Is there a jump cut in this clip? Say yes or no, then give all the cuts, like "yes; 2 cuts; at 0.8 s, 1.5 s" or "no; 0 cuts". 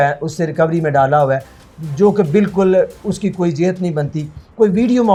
no; 0 cuts